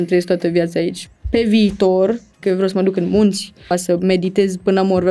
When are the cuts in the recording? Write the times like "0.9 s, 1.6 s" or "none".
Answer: 1.0 s, 2.4 s, 3.7 s